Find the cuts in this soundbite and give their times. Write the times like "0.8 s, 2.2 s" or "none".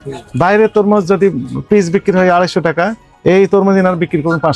none